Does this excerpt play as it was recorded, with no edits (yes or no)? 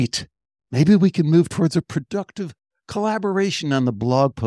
yes